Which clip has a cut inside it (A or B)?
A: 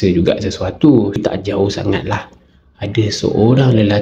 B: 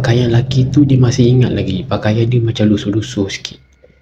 A